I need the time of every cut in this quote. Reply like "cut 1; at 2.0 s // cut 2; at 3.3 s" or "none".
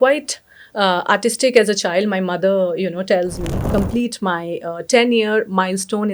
cut 1; at 3.7 s